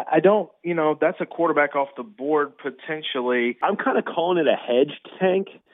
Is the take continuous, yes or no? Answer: no